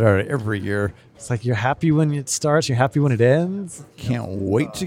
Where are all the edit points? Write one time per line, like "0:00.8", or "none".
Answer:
0:01.0
0:03.8